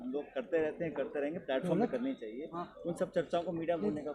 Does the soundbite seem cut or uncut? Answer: uncut